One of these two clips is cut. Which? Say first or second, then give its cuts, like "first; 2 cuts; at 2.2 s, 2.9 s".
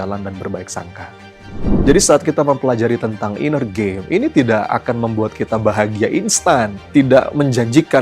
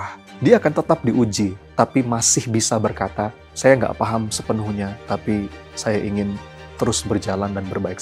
first; 1 cut; at 1.8 s